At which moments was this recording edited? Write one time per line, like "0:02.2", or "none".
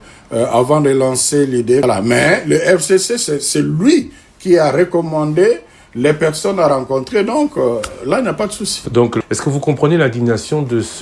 0:01.8
0:09.2

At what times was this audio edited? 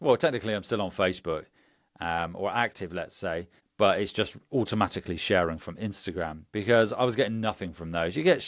0:03.6

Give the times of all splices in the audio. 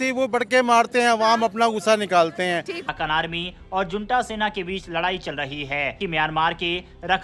0:02.9
0:06.0

